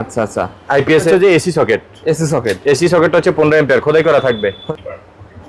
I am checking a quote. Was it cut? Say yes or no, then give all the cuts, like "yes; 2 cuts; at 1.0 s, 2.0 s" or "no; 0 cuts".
yes; 2 cuts; at 1.1 s, 4.6 s